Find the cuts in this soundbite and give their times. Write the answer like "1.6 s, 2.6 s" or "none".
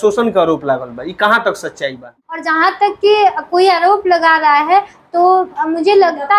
2.2 s